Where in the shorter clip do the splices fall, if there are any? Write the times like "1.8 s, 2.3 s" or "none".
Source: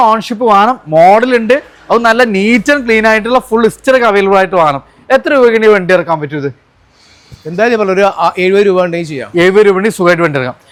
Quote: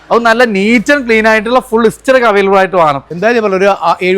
3.1 s

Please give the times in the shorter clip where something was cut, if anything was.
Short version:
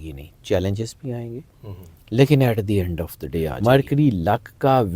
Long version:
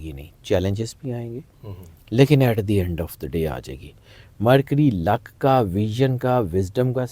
3.5 s

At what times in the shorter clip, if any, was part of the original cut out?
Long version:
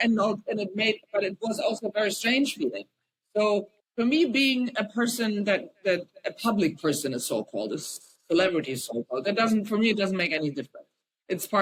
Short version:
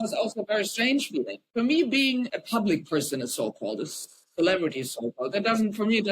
1.4 s, 2.3 s

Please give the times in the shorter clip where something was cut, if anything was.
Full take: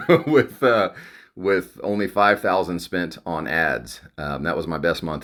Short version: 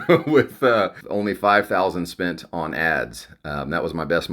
1.0 s

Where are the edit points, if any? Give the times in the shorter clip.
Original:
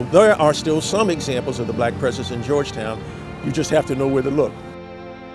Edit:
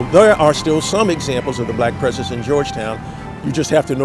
none

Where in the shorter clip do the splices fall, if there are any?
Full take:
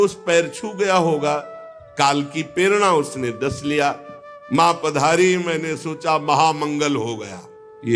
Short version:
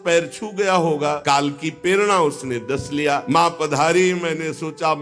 1.2 s, 3.2 s

